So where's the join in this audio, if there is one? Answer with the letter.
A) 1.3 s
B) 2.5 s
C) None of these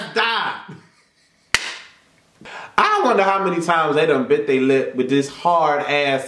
B